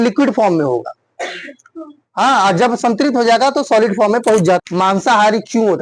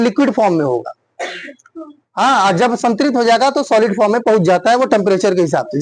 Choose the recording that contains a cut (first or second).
first